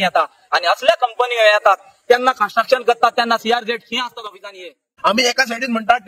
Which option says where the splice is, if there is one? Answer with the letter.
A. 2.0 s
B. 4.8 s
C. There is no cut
B